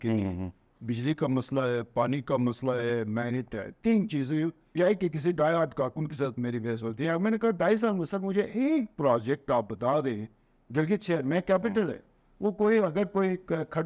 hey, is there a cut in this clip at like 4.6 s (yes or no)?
yes